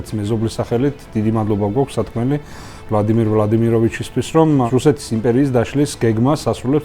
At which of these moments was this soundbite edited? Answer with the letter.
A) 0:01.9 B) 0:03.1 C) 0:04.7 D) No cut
C